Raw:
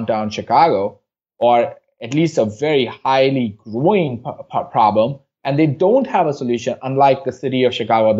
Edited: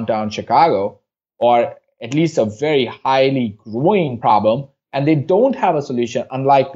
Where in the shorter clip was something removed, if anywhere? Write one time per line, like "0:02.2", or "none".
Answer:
0:04.3